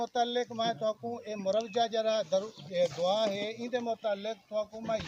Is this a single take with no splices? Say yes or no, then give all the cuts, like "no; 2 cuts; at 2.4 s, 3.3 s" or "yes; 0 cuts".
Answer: yes; 0 cuts